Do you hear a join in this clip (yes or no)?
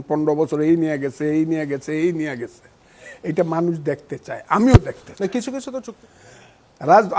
yes